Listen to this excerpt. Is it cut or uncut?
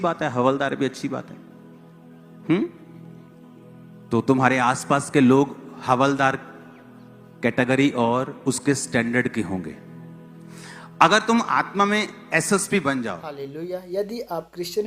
cut